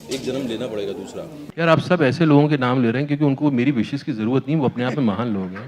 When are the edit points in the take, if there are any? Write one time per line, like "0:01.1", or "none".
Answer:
0:01.4